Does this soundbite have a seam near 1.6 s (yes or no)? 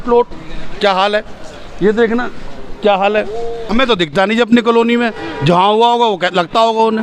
no